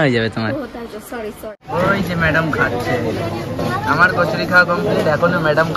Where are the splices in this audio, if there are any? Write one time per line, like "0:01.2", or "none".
0:01.4